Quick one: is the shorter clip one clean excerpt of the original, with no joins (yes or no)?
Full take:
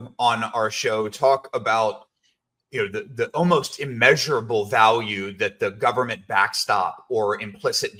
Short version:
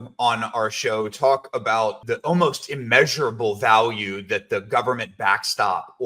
no